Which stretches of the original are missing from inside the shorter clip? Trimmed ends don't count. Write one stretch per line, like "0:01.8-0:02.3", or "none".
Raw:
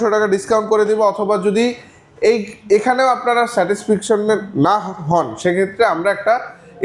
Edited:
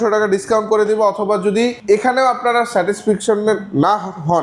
0:01.8-0:02.6